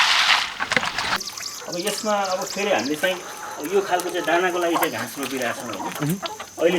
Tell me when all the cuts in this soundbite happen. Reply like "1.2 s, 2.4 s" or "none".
1.2 s